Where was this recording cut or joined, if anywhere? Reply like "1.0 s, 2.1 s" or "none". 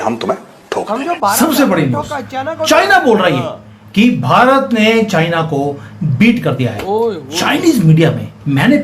1.2 s